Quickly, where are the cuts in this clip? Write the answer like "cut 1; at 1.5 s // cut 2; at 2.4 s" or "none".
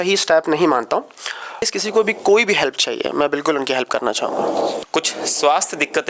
cut 1; at 1.7 s // cut 2; at 4.8 s

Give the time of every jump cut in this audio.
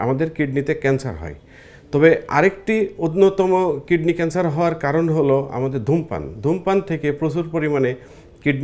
none

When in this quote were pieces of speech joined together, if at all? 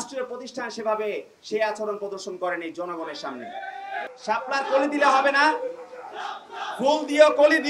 cut 1; at 4.0 s

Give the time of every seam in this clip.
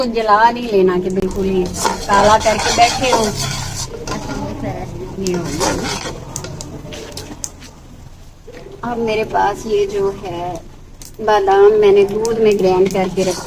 none

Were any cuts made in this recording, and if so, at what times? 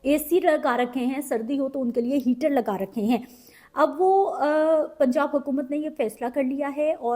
none

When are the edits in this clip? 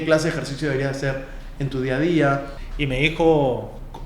cut 1; at 2.6 s

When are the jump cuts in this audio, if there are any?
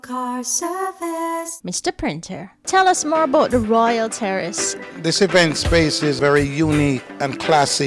cut 1; at 1.5 s

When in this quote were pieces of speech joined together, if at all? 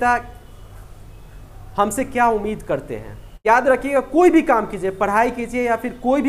cut 1; at 3.2 s

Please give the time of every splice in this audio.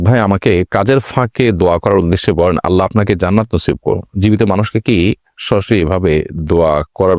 none

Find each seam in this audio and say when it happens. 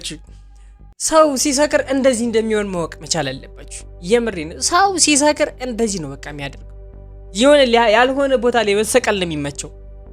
none

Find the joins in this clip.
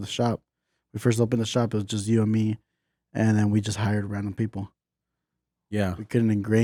none

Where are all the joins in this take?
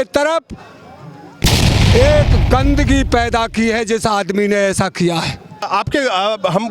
cut 1; at 5.6 s

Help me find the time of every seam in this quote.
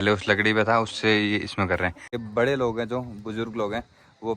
cut 1; at 2.2 s

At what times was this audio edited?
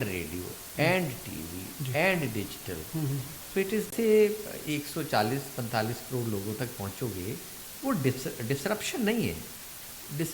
cut 1; at 3.9 s

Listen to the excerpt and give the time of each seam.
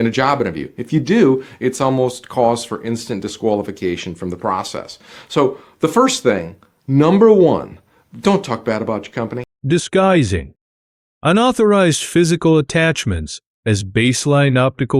none

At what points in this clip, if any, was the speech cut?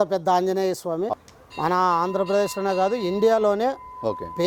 cut 1; at 1.1 s

